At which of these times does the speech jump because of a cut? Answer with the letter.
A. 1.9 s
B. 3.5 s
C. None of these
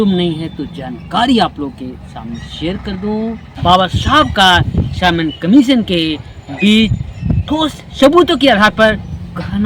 B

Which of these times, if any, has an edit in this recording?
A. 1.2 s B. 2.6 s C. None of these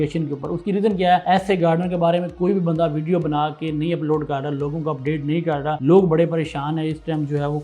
A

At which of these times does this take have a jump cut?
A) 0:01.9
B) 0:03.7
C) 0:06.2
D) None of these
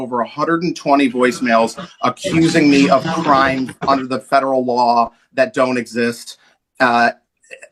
D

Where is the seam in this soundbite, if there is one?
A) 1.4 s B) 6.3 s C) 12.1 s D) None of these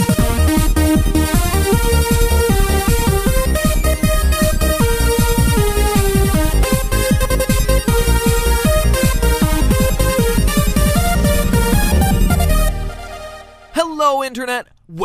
B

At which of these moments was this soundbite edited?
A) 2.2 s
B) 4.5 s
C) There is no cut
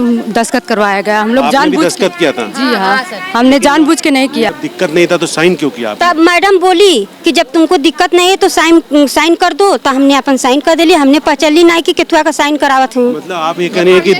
B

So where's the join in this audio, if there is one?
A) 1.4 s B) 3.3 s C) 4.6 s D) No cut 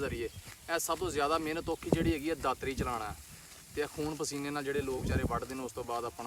D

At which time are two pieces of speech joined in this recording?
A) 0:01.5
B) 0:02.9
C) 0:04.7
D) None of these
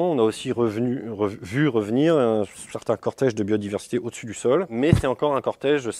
C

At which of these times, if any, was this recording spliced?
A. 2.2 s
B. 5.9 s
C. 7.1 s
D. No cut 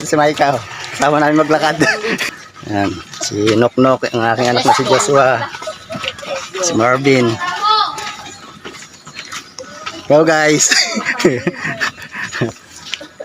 A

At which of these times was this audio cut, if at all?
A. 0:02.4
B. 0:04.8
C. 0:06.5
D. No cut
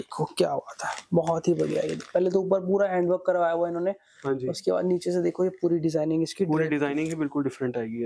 D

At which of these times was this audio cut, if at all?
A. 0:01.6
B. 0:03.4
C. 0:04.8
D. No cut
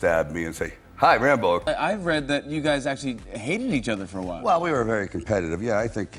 A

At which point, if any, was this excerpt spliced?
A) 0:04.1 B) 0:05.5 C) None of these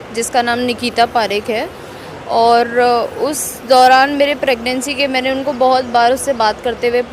C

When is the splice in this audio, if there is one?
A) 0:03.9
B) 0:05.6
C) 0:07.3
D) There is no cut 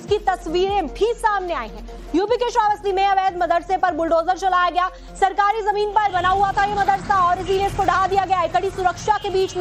B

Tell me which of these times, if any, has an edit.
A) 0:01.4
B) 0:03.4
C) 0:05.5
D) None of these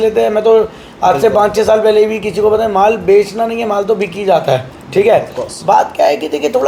D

